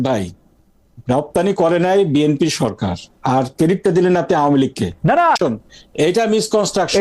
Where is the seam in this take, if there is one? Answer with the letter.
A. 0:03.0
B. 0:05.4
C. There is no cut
B